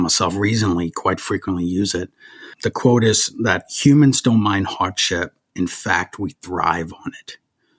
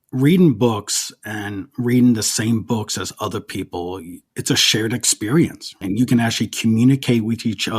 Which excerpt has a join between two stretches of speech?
second; 1 cut; at 4.2 s

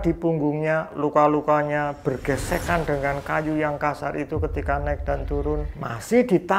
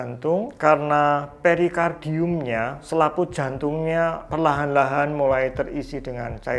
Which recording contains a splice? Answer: second; 1 cut; at 4.2 s

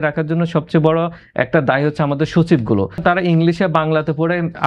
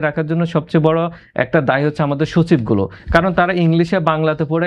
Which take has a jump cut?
first; 1 cut; at 3.0 s

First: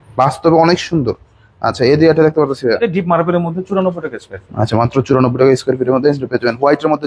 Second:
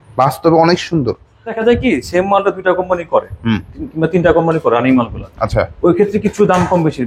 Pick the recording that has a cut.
second; 1 cut; at 1.5 s

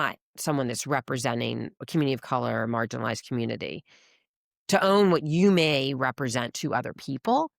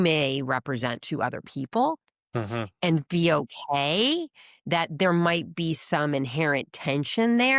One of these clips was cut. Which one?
first; 1 cut; at 1.8 s

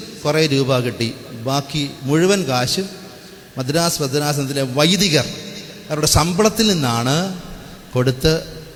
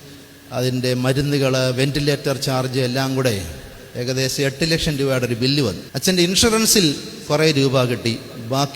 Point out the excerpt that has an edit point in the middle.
second; 1 cut; at 5.9 s

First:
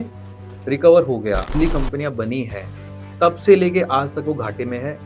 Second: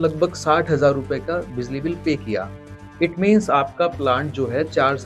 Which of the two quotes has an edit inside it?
first; 1 cut; at 1.5 s

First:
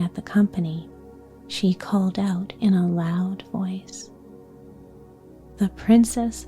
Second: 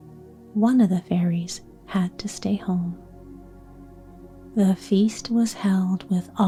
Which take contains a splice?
first; 2 cuts; at 4.1 s, 5.6 s

